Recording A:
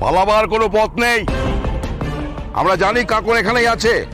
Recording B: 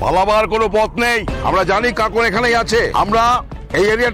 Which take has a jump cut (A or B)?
B